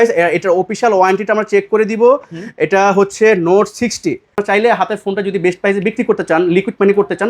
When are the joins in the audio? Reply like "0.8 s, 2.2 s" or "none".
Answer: 4.4 s